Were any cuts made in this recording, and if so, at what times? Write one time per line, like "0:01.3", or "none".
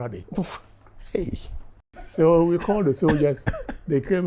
0:02.0